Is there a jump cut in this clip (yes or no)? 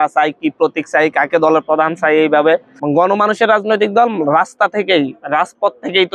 yes